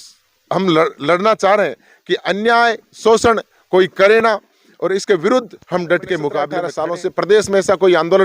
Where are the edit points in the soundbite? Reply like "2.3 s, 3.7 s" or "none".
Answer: 6.6 s